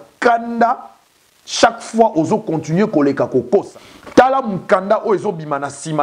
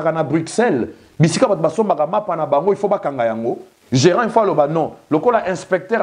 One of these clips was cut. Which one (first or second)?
first